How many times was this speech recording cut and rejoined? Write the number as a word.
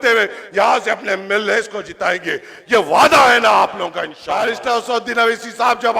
one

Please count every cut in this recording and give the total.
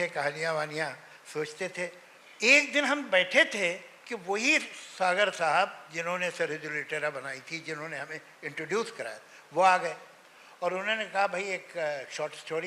zero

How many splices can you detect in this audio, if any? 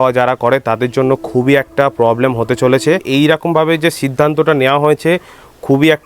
one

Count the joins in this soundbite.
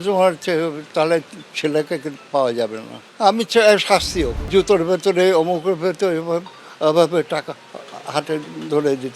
one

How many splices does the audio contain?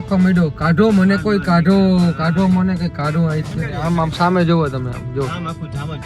one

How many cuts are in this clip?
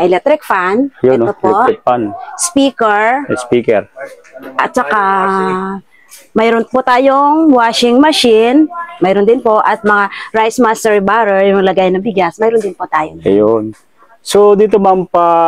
zero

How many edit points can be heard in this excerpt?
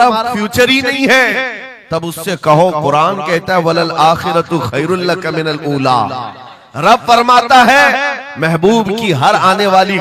zero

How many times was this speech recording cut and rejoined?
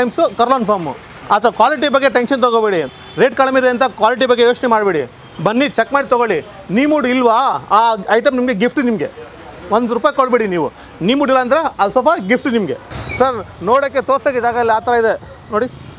one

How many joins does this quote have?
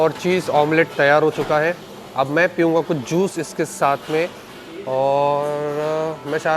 zero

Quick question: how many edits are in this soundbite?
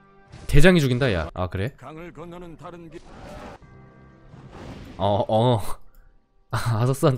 two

